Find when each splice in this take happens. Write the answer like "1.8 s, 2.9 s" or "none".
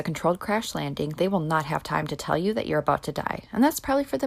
none

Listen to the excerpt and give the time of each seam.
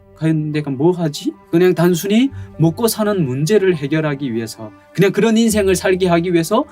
1.5 s

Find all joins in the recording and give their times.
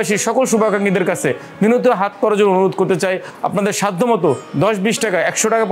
none

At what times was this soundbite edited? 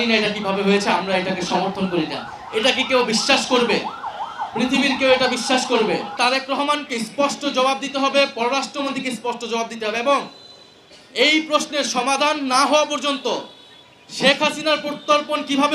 6.2 s

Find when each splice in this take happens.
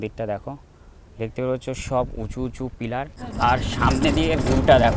3.2 s

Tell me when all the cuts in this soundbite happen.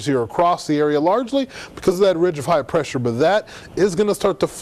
none

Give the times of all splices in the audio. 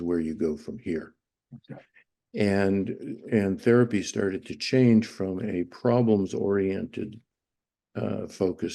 none

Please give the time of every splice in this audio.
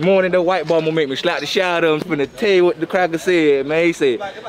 2.0 s

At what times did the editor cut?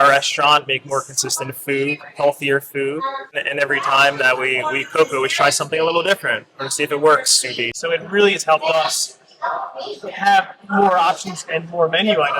3.4 s, 7.7 s

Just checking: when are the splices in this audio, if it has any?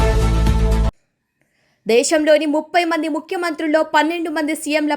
0.9 s

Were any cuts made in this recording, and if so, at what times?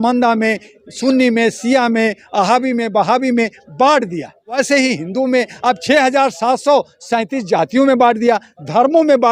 4.6 s, 5.8 s

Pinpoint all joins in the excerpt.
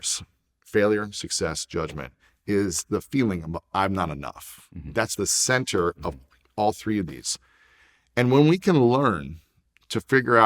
5.1 s

